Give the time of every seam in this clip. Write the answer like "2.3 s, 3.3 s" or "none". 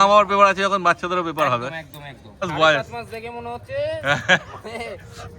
2.4 s

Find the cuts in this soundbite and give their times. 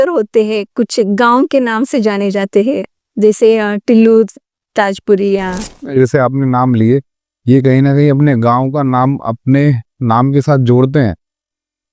5.9 s

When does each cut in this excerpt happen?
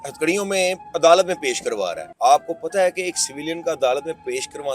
2.0 s

